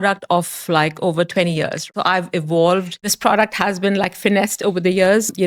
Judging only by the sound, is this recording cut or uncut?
cut